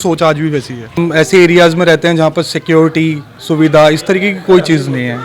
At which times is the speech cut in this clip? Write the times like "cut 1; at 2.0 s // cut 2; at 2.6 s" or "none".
cut 1; at 1.0 s